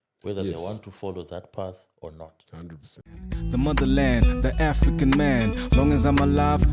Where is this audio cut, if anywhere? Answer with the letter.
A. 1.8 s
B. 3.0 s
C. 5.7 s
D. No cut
B